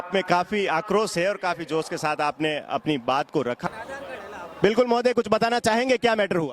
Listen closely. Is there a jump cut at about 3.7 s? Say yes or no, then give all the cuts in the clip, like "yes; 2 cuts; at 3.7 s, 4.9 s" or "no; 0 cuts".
yes; 1 cut; at 3.7 s